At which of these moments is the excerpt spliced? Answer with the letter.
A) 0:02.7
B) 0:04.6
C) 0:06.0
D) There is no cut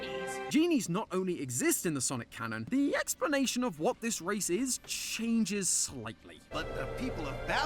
A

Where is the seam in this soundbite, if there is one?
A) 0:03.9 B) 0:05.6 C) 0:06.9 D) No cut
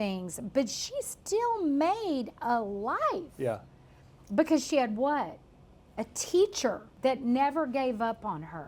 C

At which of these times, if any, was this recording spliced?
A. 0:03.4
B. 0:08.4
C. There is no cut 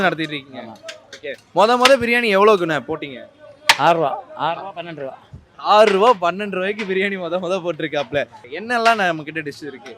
B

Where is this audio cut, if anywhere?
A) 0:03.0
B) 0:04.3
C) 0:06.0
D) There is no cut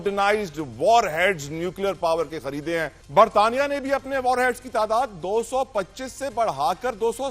A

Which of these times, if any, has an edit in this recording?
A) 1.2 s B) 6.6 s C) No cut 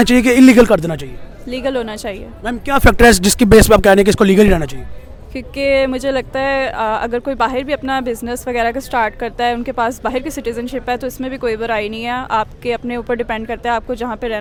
C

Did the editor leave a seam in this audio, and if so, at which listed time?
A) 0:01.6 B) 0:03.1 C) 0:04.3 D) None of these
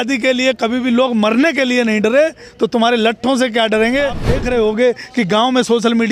C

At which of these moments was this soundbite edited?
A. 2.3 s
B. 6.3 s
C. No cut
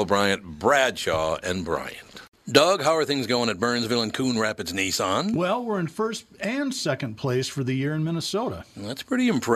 A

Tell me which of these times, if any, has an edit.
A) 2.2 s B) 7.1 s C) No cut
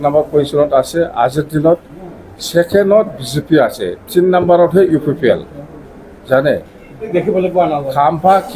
B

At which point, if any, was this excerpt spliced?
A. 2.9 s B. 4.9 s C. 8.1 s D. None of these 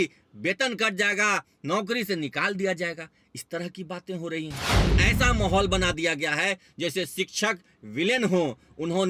B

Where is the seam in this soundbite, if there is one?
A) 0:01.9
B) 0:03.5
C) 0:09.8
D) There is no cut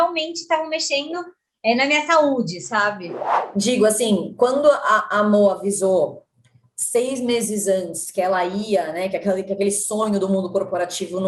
B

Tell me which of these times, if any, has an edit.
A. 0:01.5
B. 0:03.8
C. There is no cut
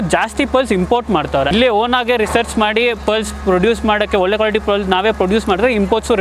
A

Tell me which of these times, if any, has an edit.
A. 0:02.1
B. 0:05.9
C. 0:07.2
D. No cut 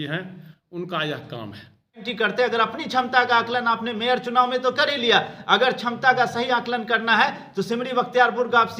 A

